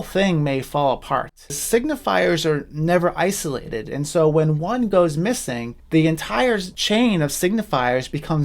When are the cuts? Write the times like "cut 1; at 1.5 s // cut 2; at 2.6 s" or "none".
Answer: cut 1; at 1.5 s // cut 2; at 6.7 s